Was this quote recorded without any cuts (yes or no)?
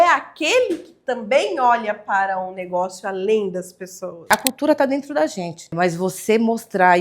no